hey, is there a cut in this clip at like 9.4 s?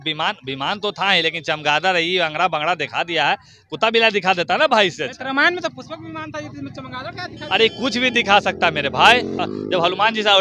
yes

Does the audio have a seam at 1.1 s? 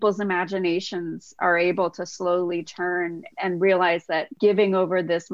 no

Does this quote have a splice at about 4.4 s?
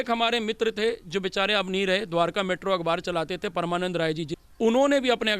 yes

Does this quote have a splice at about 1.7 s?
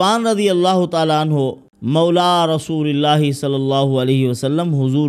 yes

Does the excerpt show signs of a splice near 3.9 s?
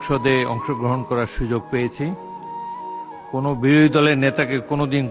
no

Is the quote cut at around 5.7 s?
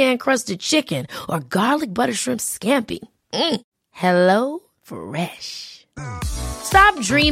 no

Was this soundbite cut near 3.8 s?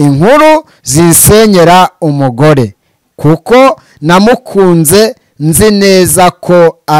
no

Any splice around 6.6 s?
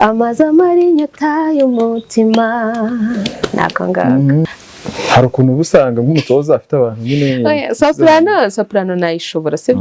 no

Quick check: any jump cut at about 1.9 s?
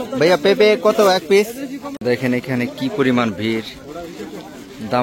yes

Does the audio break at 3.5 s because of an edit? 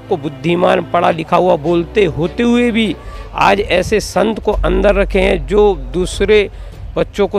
no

